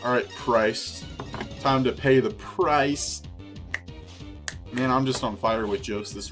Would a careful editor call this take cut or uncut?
uncut